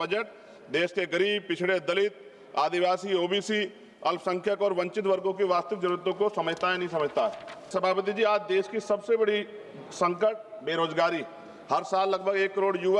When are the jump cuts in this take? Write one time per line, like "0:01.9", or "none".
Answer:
0:07.6